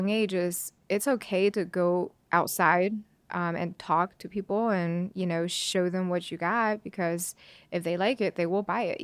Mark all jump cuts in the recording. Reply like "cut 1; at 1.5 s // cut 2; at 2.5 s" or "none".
cut 1; at 2.2 s

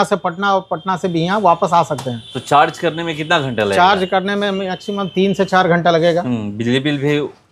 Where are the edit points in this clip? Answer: none

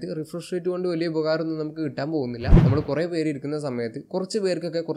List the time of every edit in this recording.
cut 1; at 2.6 s

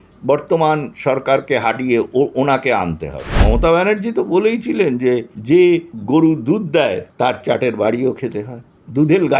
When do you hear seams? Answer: cut 1; at 3.3 s // cut 2; at 5.3 s // cut 3; at 5.9 s // cut 4; at 7.0 s

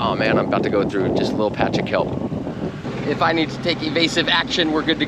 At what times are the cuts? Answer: cut 1; at 2.8 s

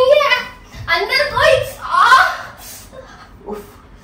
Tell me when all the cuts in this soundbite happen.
none

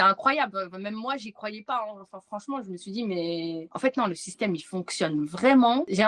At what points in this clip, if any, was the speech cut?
none

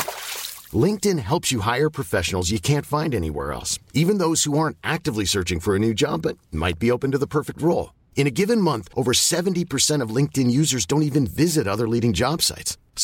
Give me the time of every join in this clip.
none

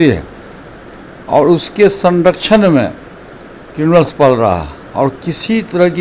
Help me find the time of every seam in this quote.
none

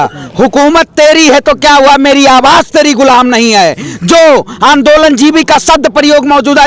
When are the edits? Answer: none

